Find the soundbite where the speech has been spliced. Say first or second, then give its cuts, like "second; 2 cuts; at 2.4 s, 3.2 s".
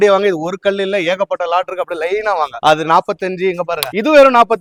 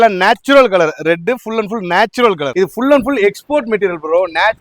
second; 1 cut; at 2.5 s